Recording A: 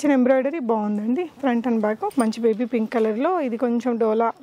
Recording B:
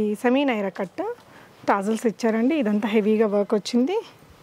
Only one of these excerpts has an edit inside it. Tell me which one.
A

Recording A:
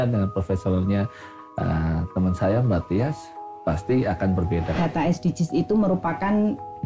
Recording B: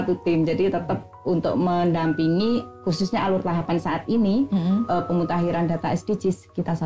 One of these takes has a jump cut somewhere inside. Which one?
A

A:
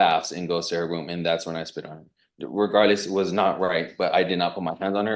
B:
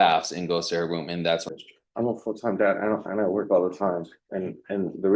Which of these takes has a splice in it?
B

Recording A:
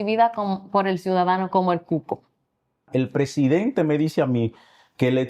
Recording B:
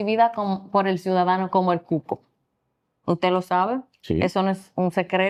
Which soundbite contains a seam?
A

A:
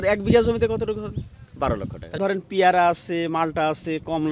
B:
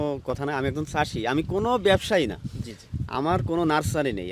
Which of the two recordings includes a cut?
A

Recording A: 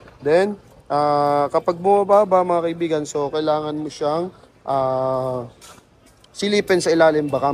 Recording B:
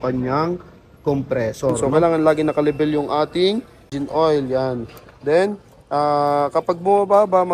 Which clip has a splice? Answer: B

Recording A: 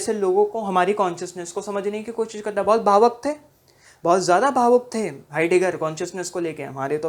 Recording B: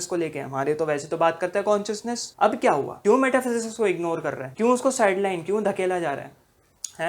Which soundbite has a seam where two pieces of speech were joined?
B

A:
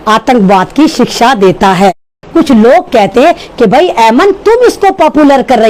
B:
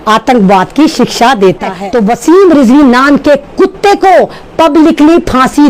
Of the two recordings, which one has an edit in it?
B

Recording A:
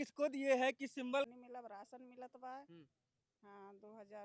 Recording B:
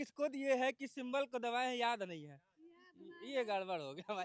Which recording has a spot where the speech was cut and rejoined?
A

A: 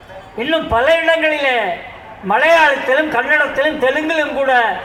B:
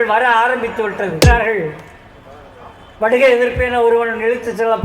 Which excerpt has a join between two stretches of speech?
B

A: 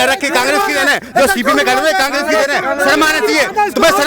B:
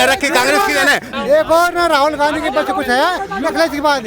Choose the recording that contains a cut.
B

